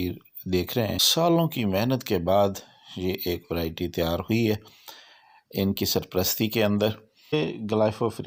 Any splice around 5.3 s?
no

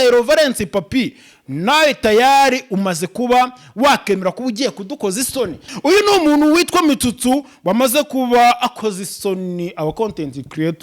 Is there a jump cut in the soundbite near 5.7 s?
yes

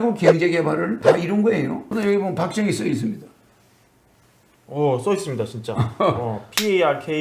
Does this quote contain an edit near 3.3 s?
no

